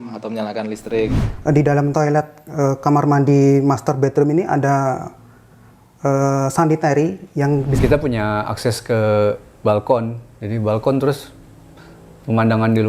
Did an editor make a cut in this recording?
yes; 2 cuts; at 1.2 s, 7.7 s

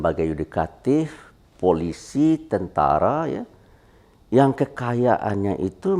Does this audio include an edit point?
no; 0 cuts

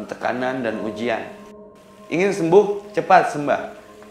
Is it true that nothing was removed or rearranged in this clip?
no; 1 cut; at 1.6 s

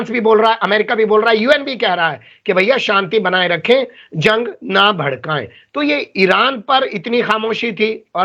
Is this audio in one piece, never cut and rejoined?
yes; 0 cuts

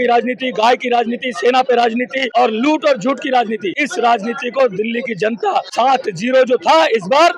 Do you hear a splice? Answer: yes; 3 cuts; at 2.2 s, 3.7 s, 5.7 s

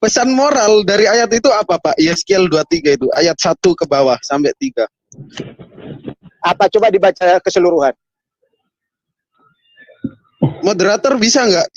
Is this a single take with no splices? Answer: yes; 0 cuts

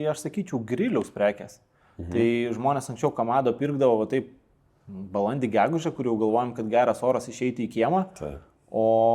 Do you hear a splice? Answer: no; 0 cuts

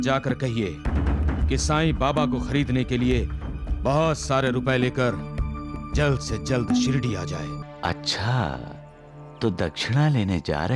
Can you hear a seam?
yes; 1 cut; at 7.6 s

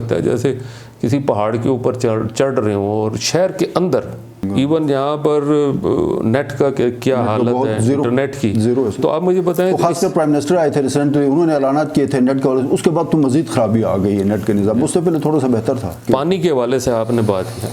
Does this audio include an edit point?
yes; 2 cuts; at 4.5 s, 16.0 s

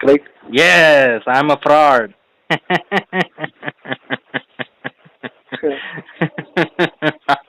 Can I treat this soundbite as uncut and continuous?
yes; 0 cuts

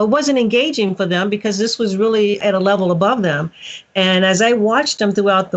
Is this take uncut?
no; 1 cut; at 2.4 s

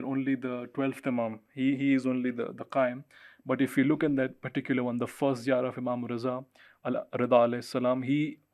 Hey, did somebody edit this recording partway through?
no; 0 cuts

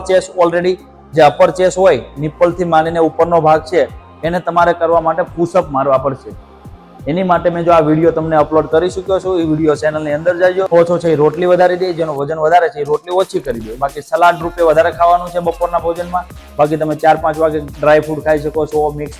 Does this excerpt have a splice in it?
yes; 1 cut; at 10.7 s

